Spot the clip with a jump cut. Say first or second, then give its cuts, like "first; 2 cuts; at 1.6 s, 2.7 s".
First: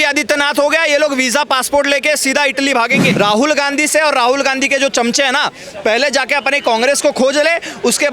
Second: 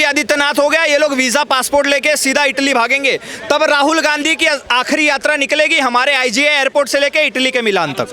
first; 1 cut; at 3.1 s